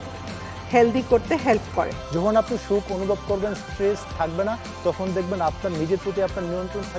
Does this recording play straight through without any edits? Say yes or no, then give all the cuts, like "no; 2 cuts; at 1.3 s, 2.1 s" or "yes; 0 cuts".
no; 1 cut; at 2.0 s